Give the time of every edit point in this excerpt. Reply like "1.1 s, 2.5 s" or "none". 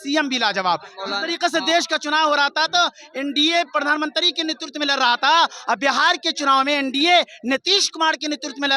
none